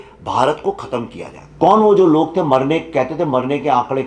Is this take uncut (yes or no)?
no